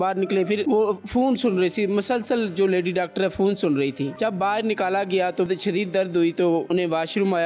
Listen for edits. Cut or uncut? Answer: cut